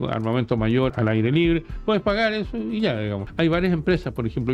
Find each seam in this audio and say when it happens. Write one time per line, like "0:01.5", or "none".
0:00.9
0:03.2